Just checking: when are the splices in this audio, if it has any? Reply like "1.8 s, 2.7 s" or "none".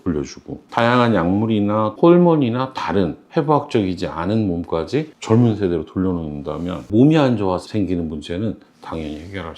1.9 s, 6.8 s

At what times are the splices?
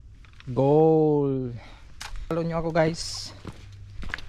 2.3 s

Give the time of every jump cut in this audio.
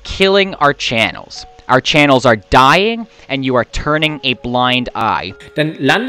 5.0 s

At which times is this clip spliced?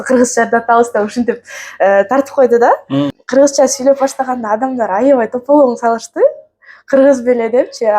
3.2 s

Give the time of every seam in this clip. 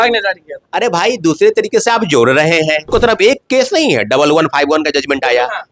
2.9 s

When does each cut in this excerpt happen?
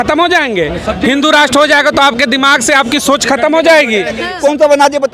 4.2 s

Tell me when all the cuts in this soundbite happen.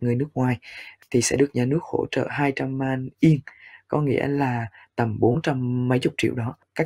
1.0 s

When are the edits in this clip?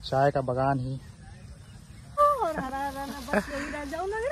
2.2 s

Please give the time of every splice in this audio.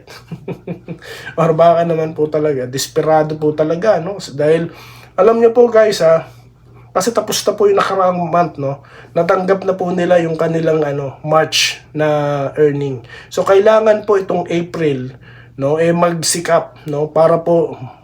none

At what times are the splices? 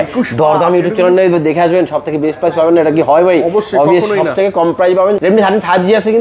5.2 s

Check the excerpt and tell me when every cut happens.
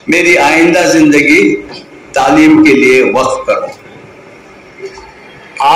4.9 s

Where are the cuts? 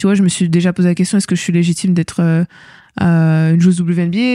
none

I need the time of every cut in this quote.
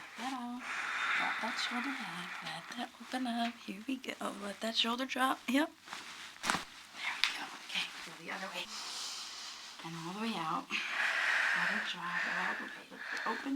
8.7 s

